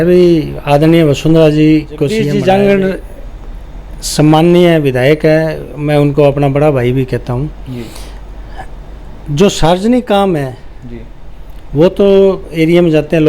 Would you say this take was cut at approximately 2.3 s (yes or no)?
yes